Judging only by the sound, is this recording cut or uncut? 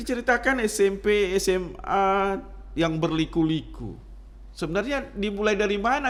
uncut